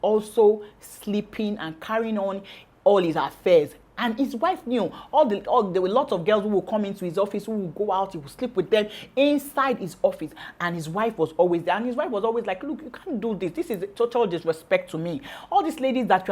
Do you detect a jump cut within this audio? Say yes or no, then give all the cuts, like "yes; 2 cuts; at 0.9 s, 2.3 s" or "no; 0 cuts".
no; 0 cuts